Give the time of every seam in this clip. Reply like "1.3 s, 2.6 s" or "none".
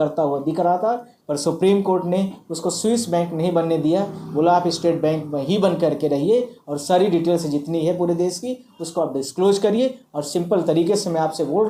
none